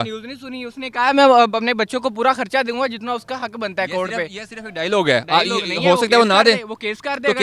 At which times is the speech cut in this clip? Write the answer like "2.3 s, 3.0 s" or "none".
none